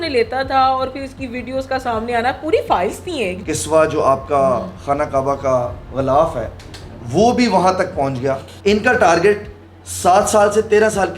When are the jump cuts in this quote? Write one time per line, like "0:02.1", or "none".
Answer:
0:03.4
0:08.5